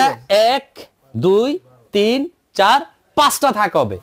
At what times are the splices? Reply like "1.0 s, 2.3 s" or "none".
none